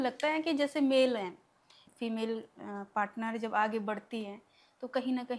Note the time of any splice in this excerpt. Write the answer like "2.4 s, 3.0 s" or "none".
1.8 s